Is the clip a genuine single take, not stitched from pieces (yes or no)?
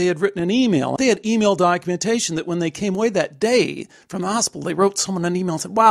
no